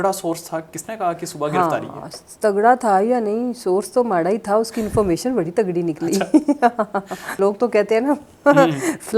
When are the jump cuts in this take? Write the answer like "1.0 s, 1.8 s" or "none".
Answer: 7.4 s